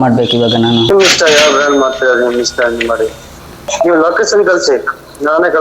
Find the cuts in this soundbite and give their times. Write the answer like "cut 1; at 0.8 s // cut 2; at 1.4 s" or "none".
cut 1; at 0.9 s // cut 2; at 3.7 s